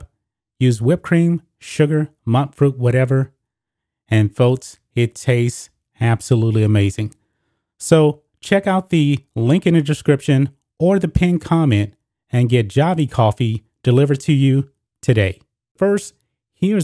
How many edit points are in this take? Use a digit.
1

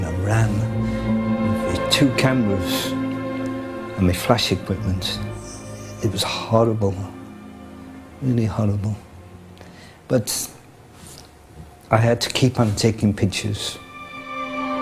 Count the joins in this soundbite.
0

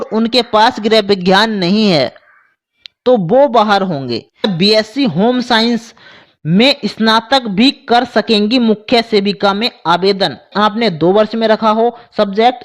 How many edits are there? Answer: 2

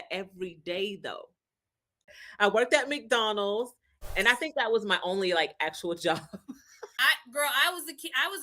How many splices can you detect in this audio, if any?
3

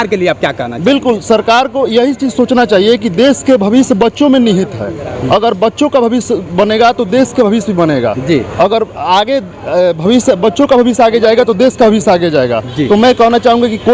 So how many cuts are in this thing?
0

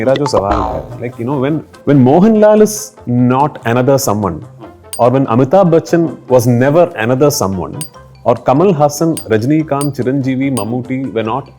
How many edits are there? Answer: 1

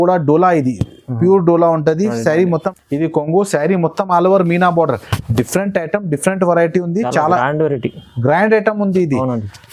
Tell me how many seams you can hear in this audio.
1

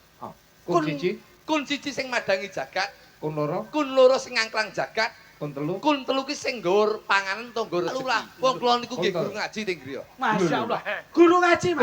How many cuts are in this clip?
1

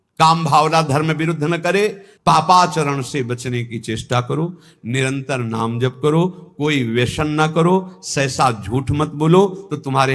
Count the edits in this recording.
1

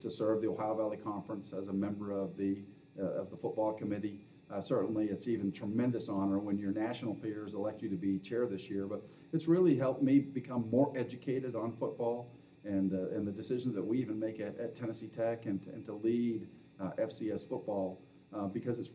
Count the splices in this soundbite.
0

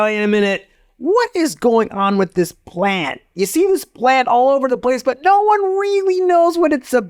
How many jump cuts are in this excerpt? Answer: 0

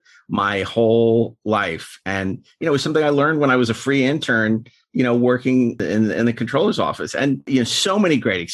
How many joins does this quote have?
2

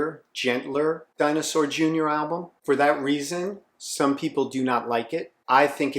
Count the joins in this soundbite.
1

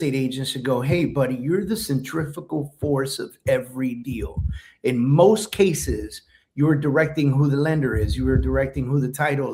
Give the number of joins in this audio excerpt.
0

